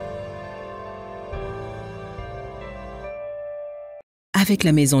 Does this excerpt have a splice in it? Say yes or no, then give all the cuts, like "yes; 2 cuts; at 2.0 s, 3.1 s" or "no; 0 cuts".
yes; 1 cut; at 4.0 s